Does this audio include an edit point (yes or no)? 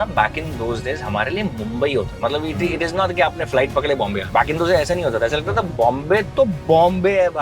yes